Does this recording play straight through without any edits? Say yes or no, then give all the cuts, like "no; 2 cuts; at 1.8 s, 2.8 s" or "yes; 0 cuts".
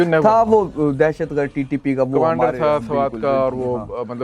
yes; 0 cuts